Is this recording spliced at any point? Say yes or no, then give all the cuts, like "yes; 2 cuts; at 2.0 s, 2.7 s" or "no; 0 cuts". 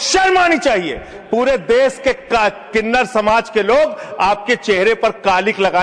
no; 0 cuts